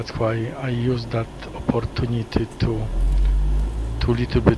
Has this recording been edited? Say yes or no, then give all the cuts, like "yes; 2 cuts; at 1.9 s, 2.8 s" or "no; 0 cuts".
no; 0 cuts